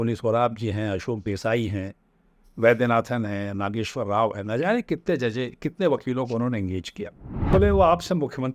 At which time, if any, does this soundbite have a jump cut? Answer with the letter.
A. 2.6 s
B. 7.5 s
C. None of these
B